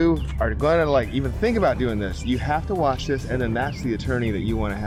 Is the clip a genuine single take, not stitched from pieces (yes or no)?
yes